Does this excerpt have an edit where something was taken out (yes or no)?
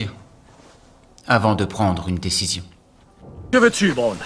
yes